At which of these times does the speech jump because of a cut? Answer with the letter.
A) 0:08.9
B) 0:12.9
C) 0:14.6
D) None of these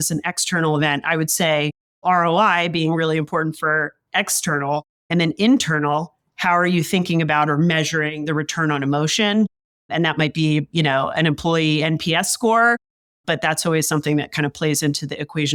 D